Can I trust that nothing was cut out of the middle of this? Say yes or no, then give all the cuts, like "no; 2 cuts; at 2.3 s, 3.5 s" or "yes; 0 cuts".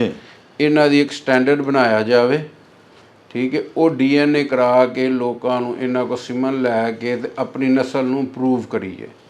yes; 0 cuts